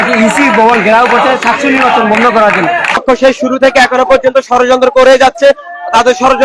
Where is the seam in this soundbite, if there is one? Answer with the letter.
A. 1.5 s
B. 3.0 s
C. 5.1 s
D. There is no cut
B